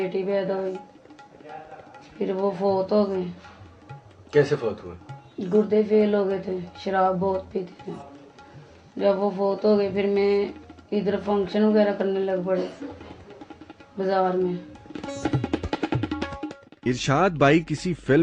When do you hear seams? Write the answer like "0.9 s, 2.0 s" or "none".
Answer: 15.0 s